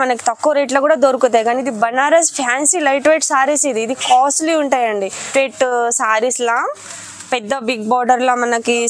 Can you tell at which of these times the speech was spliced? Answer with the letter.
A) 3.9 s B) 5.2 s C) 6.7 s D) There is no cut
B